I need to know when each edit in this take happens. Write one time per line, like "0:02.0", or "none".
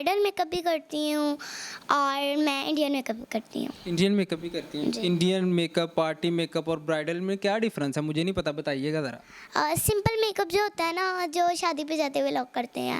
none

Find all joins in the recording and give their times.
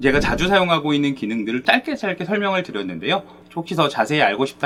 none

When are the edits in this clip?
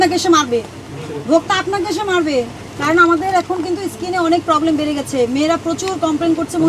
0:02.6

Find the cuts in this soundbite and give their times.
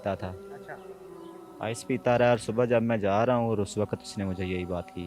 none

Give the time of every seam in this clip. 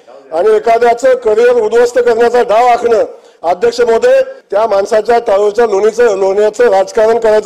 0:04.4

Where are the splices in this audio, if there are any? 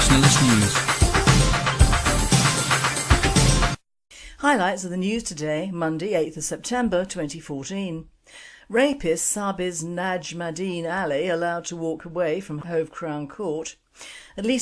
0:13.7

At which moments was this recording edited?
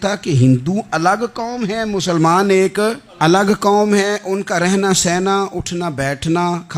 0:03.0

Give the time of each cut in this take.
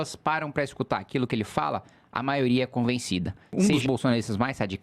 0:03.5

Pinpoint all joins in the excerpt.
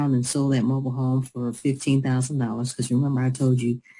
0:02.6

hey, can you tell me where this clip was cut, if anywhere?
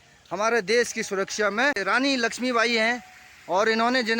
0:01.8

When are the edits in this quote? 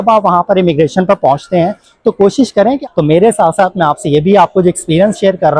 0:02.8

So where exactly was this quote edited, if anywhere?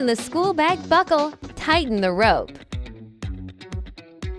0:02.5

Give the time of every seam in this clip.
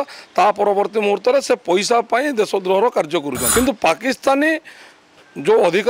0:03.4

